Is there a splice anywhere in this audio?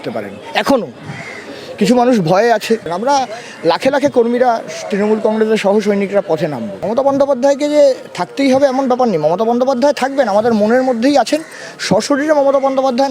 yes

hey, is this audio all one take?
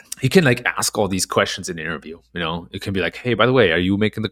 yes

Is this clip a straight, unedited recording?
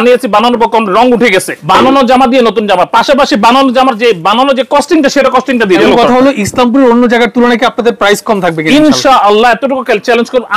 no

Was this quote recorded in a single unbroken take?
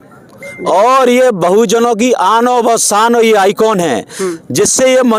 yes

